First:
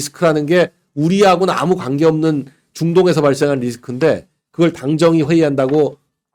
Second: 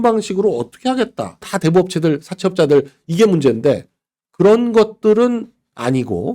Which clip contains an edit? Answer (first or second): second